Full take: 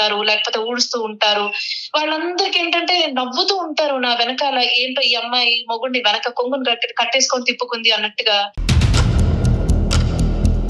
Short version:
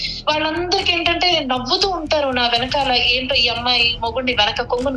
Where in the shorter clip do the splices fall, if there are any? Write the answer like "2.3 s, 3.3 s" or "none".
none